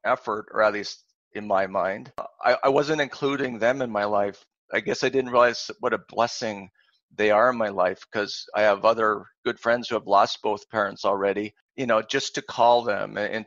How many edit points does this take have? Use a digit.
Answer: 2